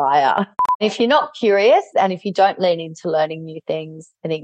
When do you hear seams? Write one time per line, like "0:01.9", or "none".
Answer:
0:00.8
0:01.9